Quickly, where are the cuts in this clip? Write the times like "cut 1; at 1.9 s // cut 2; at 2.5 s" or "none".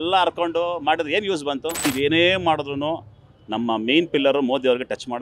cut 1; at 1.8 s